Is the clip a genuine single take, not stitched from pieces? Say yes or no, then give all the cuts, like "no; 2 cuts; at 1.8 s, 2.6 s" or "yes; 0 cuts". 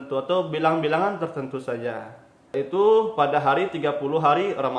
no; 1 cut; at 2.5 s